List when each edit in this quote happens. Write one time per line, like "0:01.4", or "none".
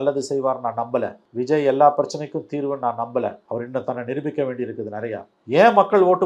0:01.2
0:03.4
0:05.3